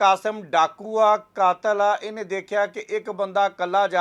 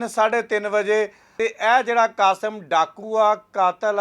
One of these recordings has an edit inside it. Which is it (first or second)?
second